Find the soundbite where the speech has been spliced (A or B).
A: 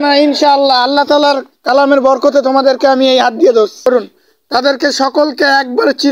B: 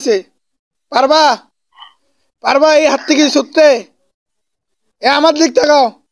A